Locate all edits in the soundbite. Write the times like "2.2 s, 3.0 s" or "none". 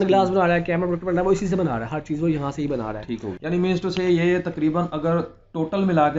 3.3 s